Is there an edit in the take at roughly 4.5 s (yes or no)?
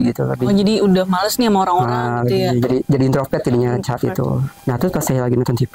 yes